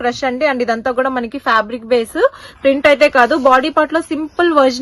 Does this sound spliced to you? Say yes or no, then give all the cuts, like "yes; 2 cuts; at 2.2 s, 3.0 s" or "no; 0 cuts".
no; 0 cuts